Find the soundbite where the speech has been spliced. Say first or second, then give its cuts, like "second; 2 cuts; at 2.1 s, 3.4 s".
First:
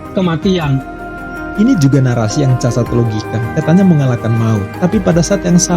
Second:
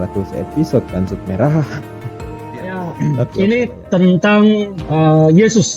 second; 1 cut; at 2.8 s